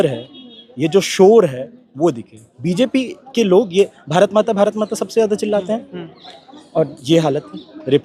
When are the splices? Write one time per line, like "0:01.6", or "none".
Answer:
none